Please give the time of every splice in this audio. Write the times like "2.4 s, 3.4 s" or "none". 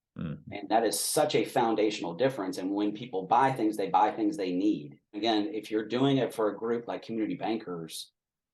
5.2 s